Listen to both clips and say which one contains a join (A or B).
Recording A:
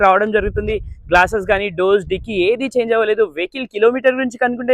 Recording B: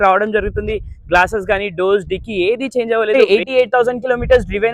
B